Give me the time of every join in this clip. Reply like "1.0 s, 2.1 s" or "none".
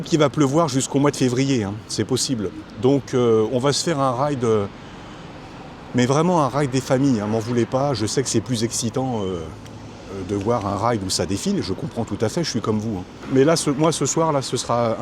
13.2 s